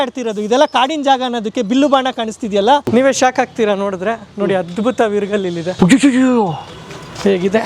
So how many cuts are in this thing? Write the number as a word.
two